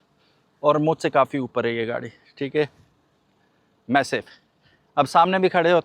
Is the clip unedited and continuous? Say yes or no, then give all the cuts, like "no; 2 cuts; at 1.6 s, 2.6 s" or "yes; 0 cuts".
yes; 0 cuts